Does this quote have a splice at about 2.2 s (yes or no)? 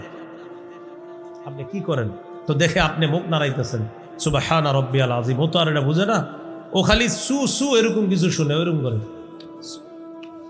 no